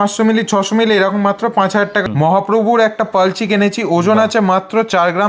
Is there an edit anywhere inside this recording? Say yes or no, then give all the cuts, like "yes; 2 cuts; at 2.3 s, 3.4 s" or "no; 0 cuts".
yes; 1 cut; at 2.0 s